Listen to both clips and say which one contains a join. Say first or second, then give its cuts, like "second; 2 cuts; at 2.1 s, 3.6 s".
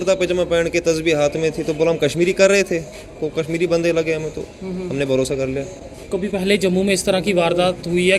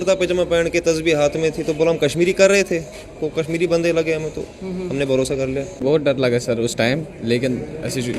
second; 1 cut; at 5.8 s